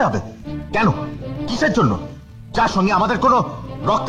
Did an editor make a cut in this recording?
no; 0 cuts

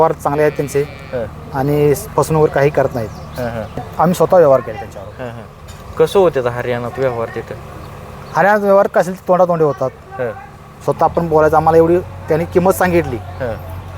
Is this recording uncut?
no; 1 cut; at 3.9 s

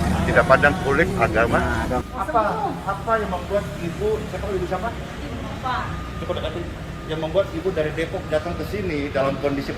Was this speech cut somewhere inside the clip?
yes; 1 cut; at 2.0 s

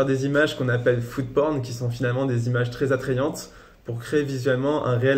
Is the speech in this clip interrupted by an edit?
no; 0 cuts

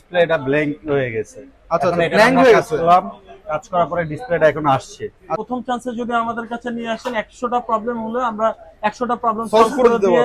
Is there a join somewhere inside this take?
yes; 1 cut; at 5.4 s

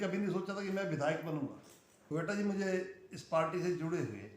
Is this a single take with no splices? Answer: no; 1 cut; at 2.0 s

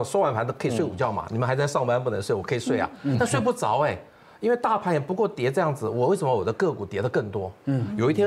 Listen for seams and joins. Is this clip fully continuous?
yes; 0 cuts

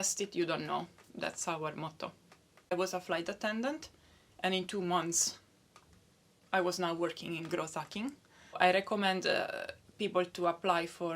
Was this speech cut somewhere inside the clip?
yes; 2 cuts; at 2.7 s, 8.6 s

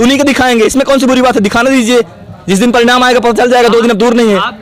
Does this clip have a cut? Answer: no; 0 cuts

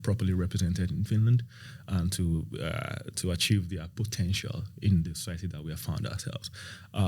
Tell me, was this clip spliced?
no; 0 cuts

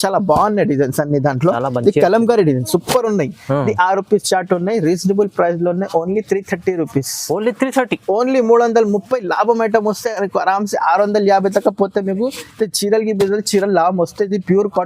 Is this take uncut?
yes; 0 cuts

